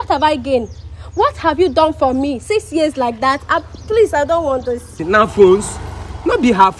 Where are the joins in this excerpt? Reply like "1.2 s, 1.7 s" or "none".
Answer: 5.0 s